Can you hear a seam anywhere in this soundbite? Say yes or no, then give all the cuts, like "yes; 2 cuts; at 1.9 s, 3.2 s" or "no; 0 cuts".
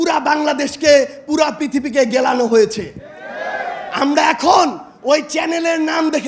no; 0 cuts